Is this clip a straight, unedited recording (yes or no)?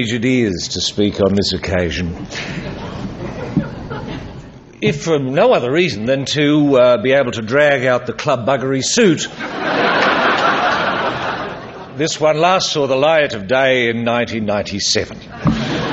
yes